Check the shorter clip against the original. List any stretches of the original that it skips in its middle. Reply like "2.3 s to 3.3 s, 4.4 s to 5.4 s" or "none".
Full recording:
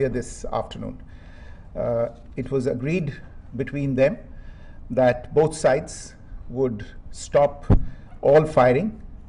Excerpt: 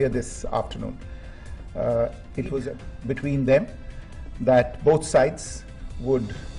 2.7 s to 3.2 s